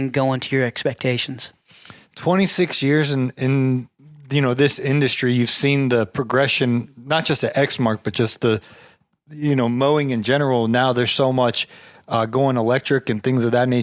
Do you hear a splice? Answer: no; 0 cuts

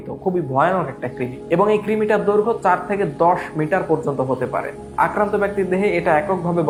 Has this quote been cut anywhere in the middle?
no; 0 cuts

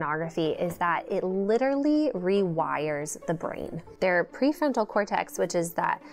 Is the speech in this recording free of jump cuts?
no; 1 cut; at 3.8 s

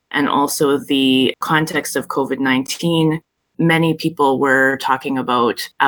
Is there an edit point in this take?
yes; 1 cut; at 3.2 s

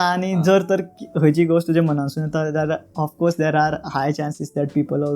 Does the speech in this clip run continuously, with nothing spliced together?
yes; 0 cuts

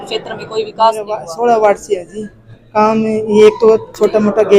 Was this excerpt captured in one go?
no; 1 cut; at 1.1 s

